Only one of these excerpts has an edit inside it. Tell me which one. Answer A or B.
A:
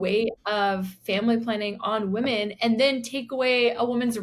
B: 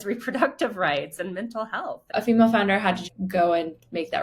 B